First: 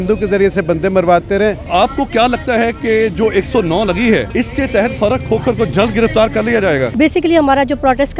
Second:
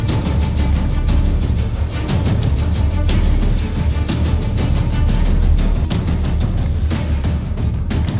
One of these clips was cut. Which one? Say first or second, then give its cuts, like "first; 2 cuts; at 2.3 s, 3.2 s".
first; 3 cuts; at 1.6 s, 4.3 s, 6.9 s